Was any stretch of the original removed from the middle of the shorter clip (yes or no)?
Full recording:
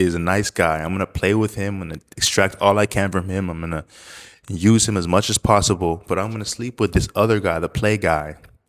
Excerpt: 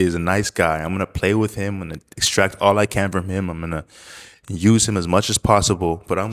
no